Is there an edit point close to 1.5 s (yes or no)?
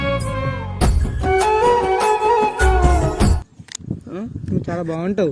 no